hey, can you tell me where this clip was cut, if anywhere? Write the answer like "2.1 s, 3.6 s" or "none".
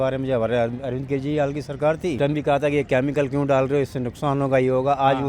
2.2 s